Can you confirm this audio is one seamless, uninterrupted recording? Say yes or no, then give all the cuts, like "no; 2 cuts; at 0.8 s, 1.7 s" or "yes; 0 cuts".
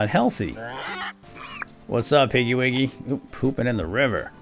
no; 1 cut; at 1.0 s